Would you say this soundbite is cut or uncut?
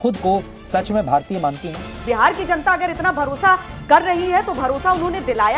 cut